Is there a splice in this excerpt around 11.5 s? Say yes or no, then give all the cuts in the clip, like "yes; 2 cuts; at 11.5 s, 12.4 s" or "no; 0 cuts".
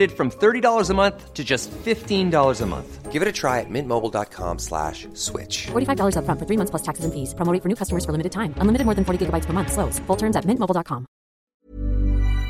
yes; 1 cut; at 11.5 s